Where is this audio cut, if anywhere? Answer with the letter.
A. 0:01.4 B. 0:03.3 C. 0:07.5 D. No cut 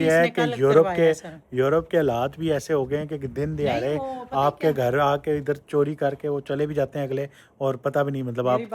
D